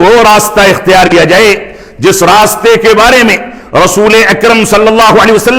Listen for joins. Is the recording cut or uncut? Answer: cut